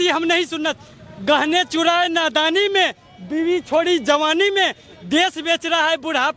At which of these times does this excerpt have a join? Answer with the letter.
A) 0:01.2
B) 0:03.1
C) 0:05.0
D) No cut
D